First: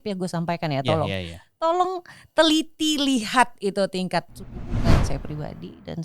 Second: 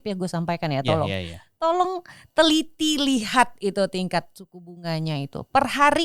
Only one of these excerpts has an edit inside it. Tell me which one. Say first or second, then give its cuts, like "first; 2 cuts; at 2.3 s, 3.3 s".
first; 1 cut; at 4.9 s